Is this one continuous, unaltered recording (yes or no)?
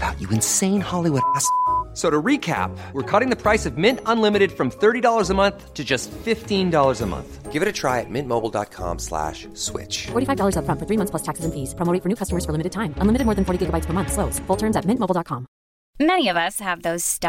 yes